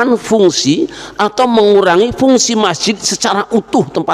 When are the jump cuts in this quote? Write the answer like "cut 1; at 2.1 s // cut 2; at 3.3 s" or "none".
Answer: none